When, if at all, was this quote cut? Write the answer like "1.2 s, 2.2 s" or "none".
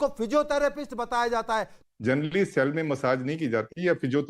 1.8 s